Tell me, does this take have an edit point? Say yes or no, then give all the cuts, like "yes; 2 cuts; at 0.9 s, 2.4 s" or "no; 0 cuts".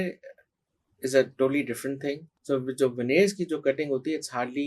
yes; 1 cut; at 2.3 s